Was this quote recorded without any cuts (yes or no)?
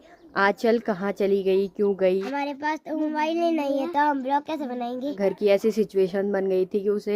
no